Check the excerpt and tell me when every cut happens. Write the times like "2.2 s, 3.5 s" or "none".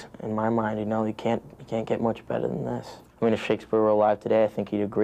3.0 s